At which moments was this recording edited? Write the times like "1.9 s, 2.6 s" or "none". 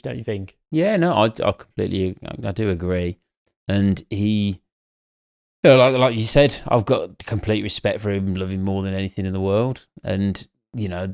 none